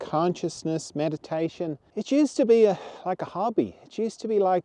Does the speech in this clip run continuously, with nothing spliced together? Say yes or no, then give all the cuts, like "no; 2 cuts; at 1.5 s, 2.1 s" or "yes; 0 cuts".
no; 1 cut; at 1.8 s